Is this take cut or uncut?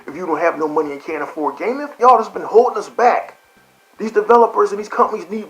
cut